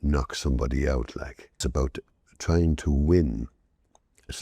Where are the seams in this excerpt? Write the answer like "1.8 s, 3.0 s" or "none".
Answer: 1.7 s